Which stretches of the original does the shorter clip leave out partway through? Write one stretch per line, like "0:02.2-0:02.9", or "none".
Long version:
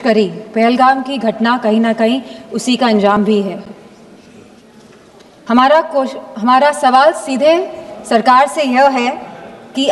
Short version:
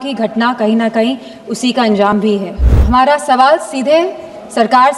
0:03.7-0:06.2